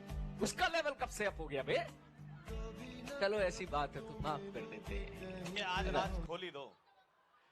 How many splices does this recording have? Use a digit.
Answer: 1